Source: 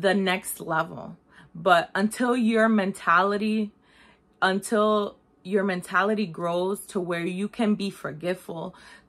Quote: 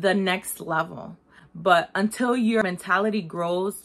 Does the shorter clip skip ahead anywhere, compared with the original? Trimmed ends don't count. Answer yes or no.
yes